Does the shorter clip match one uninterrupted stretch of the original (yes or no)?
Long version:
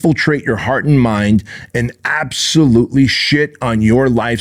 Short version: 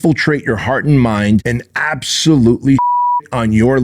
no